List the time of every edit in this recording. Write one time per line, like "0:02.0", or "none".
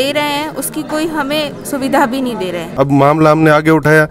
0:02.7